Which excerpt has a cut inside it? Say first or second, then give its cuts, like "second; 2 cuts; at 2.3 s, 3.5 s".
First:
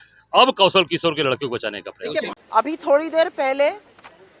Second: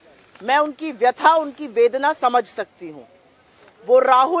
first; 1 cut; at 2.3 s